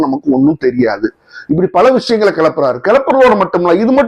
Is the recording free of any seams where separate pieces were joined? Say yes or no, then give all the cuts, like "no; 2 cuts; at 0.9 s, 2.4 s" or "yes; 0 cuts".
yes; 0 cuts